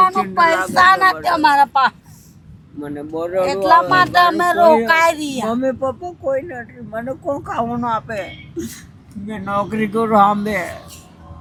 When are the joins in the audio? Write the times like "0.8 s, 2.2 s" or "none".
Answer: none